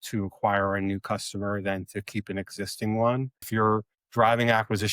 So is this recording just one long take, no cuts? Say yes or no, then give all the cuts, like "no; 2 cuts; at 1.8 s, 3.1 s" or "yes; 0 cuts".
no; 1 cut; at 3.5 s